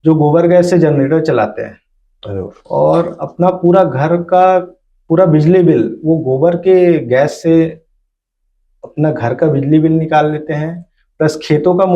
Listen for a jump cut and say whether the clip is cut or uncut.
uncut